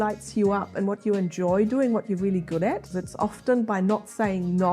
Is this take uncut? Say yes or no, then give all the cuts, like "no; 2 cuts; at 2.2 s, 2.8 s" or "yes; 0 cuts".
no; 1 cut; at 3.0 s